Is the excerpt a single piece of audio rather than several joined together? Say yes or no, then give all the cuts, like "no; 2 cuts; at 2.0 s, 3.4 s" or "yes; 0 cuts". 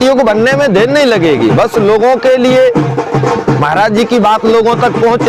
yes; 0 cuts